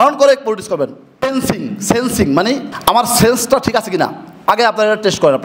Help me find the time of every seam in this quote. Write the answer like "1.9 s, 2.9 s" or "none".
1.2 s, 2.7 s